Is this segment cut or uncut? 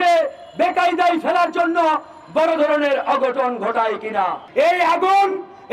cut